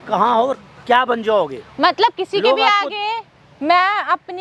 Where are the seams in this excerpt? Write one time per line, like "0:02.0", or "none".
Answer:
none